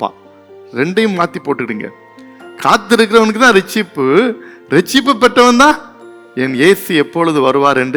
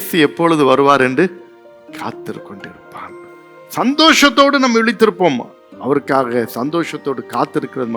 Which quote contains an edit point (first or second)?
second